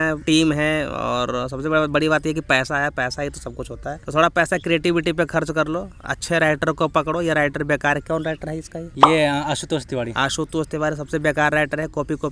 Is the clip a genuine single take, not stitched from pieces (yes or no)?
yes